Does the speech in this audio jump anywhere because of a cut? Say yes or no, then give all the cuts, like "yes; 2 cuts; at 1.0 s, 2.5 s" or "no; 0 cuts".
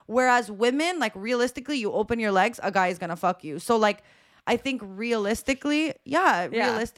no; 0 cuts